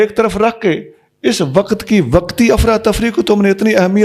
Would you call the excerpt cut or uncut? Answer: uncut